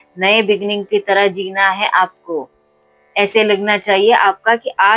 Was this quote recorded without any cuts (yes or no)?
yes